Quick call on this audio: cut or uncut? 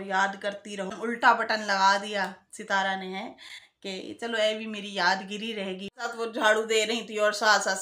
cut